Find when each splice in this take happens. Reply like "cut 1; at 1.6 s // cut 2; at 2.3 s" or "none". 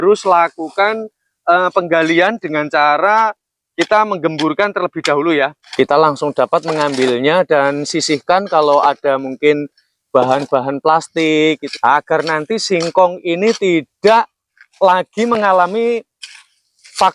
cut 1; at 5.6 s // cut 2; at 11.7 s